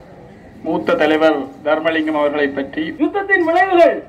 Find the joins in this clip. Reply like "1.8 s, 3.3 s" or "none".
2.8 s